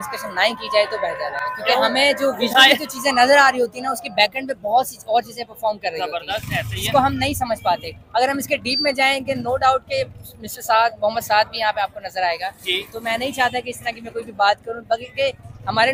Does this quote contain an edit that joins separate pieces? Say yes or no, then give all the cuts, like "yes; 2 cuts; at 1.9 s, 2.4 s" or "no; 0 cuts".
no; 0 cuts